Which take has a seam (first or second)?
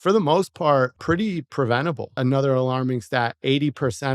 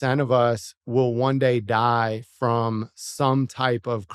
first